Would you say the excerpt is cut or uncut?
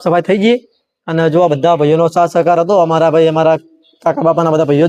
uncut